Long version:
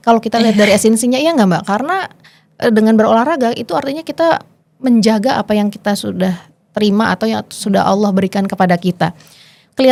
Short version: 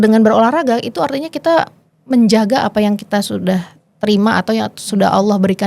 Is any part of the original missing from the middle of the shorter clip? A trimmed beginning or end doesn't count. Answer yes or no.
no